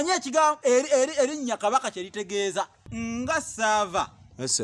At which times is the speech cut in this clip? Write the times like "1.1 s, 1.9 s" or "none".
2.8 s